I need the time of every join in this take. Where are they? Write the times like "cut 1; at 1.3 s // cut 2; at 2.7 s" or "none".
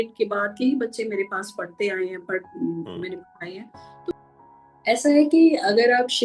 cut 1; at 4.1 s